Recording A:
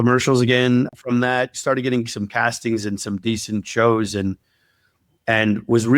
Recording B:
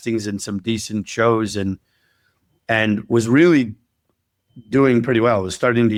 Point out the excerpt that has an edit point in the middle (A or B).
A